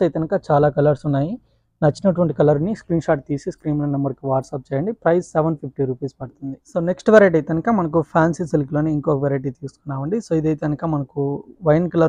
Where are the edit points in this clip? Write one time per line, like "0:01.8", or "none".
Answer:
none